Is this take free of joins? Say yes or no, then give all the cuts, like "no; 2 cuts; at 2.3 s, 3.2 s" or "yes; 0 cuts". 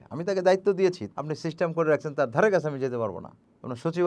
no; 1 cut; at 1.0 s